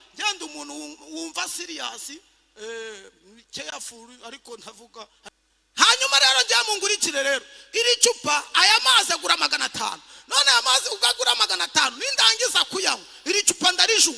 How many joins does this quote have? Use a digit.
1